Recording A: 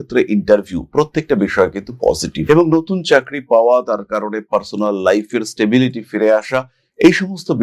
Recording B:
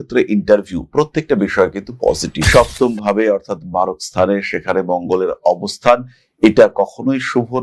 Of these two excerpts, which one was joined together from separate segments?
B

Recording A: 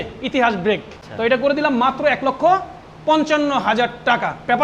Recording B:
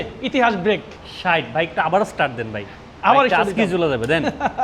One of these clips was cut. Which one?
A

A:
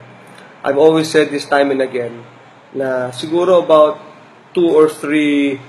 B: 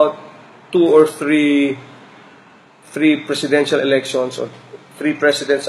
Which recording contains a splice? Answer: A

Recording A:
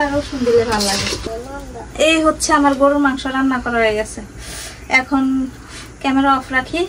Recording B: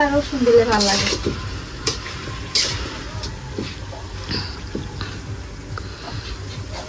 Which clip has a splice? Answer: A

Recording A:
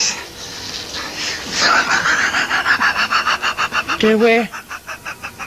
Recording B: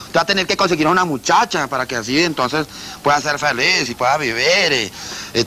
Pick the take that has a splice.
A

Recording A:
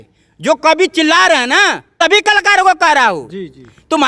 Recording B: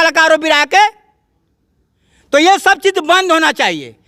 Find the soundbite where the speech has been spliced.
A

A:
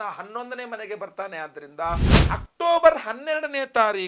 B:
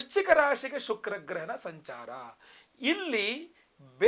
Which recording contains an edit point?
A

